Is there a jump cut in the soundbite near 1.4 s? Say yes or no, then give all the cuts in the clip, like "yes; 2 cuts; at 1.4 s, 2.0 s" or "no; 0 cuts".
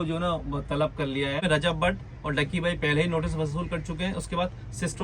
yes; 1 cut; at 1.4 s